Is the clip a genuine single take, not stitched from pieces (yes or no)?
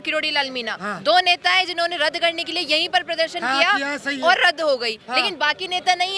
yes